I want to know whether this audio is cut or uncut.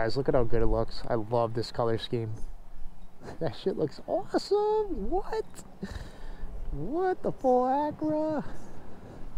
uncut